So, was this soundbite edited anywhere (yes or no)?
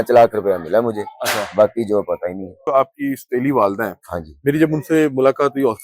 yes